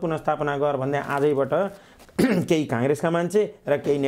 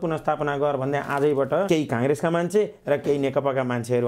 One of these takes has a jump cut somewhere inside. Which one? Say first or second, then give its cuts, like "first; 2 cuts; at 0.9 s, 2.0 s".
second; 1 cut; at 1.7 s